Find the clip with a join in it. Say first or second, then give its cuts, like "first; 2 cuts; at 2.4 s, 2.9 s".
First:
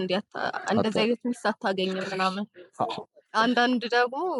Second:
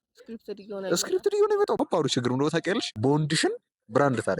second; 2 cuts; at 1.8 s, 2.9 s